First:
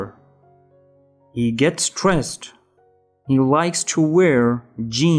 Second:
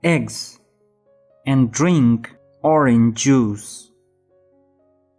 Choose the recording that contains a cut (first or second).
second